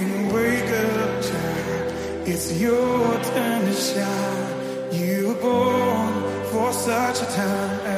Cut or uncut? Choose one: uncut